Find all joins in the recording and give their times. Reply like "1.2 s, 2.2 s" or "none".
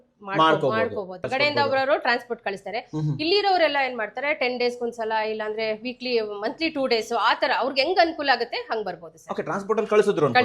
1.3 s